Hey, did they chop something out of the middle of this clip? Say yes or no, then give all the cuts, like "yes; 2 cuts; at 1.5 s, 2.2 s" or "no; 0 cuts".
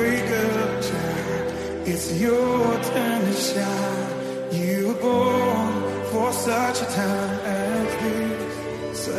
no; 0 cuts